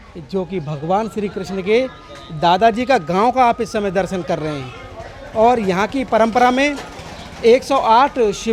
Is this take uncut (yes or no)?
yes